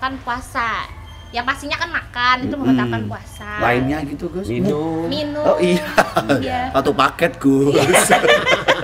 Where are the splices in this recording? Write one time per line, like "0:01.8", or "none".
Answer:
none